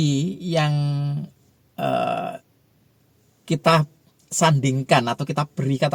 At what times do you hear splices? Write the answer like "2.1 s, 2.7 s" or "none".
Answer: none